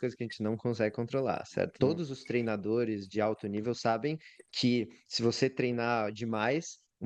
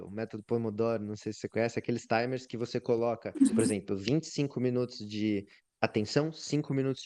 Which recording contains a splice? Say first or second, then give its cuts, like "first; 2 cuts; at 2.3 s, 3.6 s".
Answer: first; 1 cut; at 1.7 s